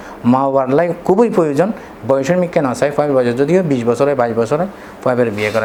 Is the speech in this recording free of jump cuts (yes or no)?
yes